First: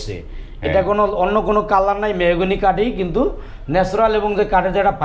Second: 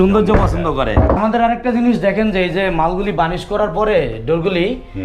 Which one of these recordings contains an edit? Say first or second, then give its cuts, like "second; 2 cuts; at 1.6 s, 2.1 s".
second; 1 cut; at 1.2 s